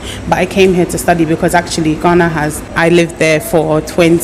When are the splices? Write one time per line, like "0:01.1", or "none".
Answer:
0:02.6